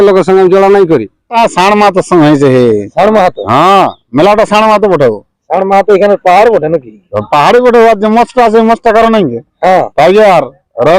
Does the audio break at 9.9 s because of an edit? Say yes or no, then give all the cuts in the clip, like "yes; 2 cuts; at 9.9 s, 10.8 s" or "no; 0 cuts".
yes; 2 cuts; at 1.3 s, 9.9 s